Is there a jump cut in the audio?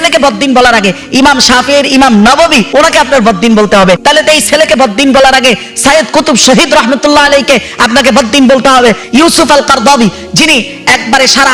yes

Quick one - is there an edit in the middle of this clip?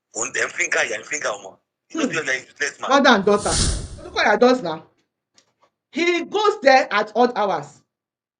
yes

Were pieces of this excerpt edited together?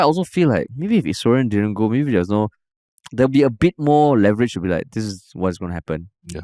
no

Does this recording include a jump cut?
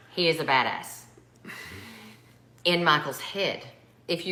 no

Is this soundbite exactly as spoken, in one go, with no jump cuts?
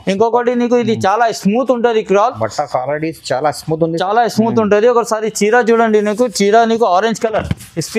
yes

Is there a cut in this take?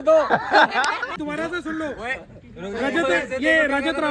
yes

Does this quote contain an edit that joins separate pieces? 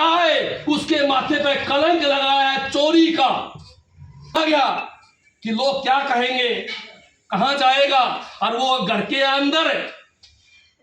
yes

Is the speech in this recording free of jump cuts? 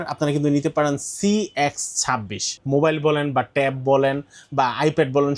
no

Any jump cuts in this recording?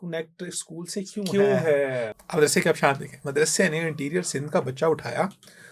yes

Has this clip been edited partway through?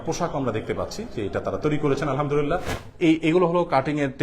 yes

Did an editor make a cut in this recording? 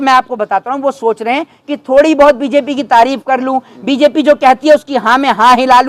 no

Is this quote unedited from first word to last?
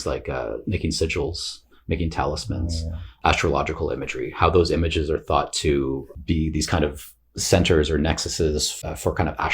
no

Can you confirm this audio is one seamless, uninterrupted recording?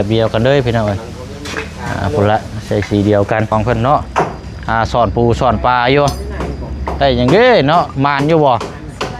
no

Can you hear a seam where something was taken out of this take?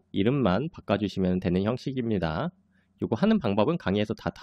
no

